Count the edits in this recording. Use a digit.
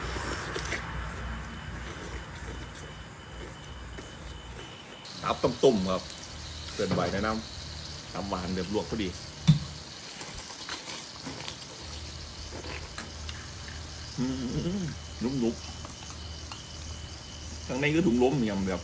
1